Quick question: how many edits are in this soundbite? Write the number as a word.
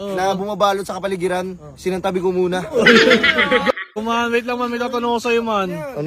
one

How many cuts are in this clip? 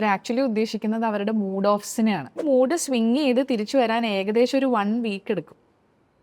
one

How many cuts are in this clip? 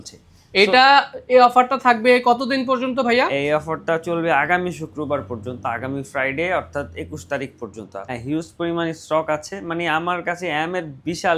one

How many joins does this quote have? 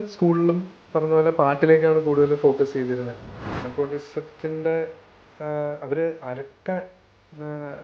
one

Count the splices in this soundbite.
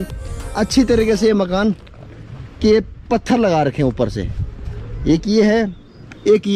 zero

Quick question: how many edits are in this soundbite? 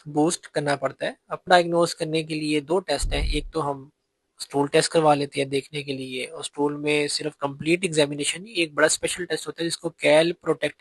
one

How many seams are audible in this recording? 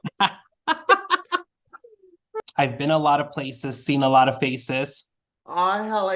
one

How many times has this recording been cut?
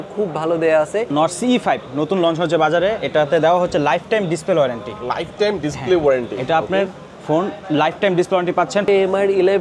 two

